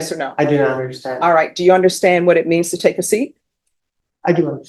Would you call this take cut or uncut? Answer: uncut